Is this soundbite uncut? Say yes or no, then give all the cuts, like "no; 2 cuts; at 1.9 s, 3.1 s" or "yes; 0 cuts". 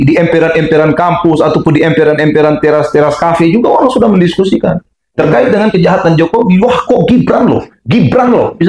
yes; 0 cuts